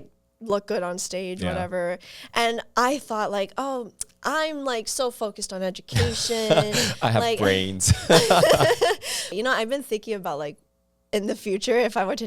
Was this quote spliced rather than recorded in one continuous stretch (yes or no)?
yes